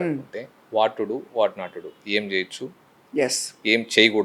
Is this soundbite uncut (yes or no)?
yes